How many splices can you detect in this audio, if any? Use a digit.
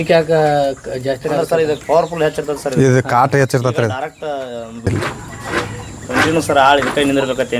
1